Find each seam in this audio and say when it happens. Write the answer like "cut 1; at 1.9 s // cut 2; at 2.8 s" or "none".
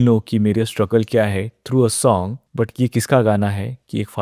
cut 1; at 2.4 s

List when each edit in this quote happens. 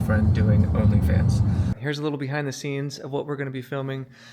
cut 1; at 1.8 s

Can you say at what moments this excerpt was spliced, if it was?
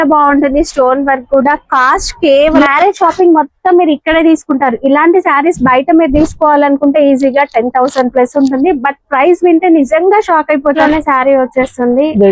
cut 1; at 2.6 s // cut 2; at 10.8 s

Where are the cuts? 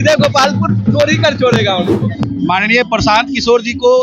cut 1; at 2.2 s

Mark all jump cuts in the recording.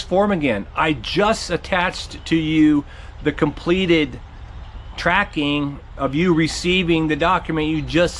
none

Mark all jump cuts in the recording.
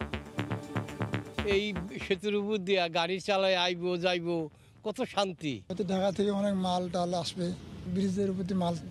cut 1; at 1.3 s // cut 2; at 5.6 s // cut 3; at 7.8 s

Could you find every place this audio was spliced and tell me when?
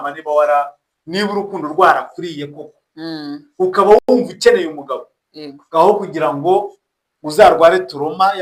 none

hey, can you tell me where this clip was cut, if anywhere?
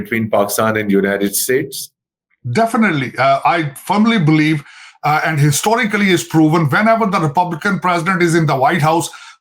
none

